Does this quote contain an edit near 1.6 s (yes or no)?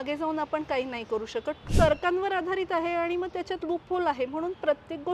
yes